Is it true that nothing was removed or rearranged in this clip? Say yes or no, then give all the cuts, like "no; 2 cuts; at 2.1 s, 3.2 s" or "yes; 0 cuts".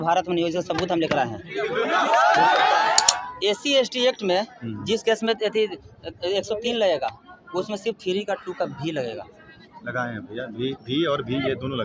no; 1 cut; at 3.0 s